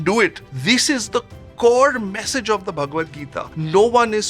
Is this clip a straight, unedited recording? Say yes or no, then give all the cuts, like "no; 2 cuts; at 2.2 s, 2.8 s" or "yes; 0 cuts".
yes; 0 cuts